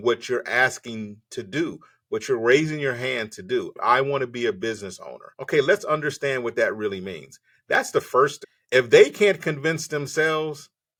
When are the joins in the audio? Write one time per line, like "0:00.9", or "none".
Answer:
none